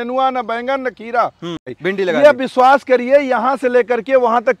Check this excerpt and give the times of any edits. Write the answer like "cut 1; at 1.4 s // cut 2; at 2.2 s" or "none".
cut 1; at 1.7 s